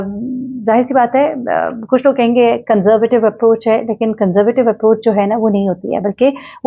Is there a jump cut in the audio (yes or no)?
no